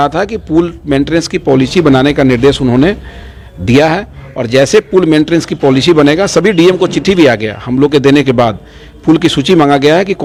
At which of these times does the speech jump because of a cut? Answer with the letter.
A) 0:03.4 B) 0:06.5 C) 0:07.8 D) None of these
D